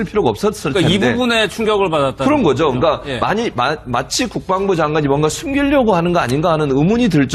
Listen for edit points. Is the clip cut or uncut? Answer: cut